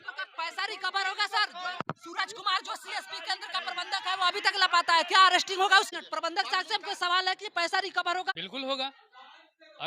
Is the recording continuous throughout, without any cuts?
no; 2 cuts; at 1.8 s, 8.4 s

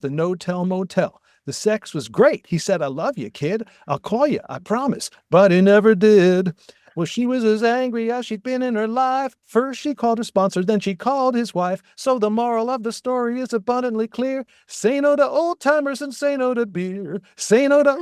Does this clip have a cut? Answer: no; 0 cuts

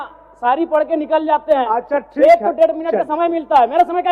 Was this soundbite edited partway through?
no; 0 cuts

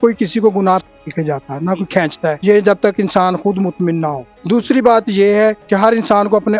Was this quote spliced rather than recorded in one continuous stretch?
yes; 4 cuts; at 1.0 s, 2.4 s, 4.3 s, 5.6 s

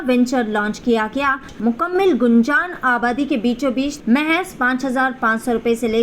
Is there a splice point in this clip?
yes; 2 cuts; at 1.5 s, 4.0 s

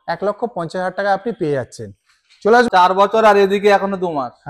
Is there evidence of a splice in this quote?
yes; 1 cut; at 2.7 s

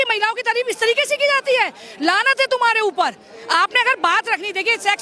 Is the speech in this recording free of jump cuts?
yes; 0 cuts

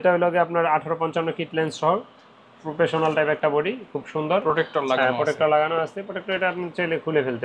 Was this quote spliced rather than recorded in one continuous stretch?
no; 0 cuts

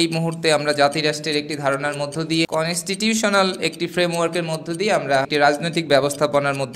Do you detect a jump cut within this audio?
yes; 2 cuts; at 2.5 s, 5.3 s

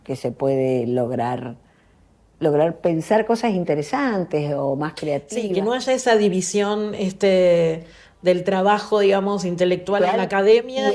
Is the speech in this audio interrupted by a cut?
no; 0 cuts

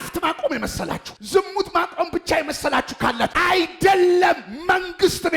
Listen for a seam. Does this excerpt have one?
yes; 1 cut; at 3.4 s

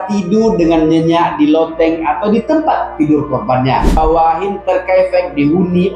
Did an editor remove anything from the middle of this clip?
yes; 1 cut; at 4.0 s

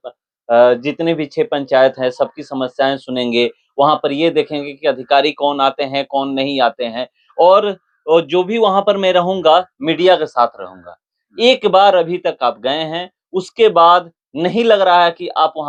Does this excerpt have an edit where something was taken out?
no; 0 cuts

